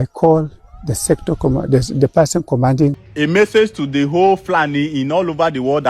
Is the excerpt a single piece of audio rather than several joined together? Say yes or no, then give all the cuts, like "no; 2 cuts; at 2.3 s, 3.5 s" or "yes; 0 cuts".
no; 1 cut; at 3.0 s